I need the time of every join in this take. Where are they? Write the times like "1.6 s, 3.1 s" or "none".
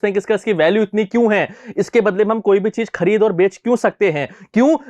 none